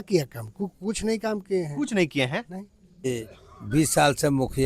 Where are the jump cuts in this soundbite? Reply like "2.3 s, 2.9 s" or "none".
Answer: 3.1 s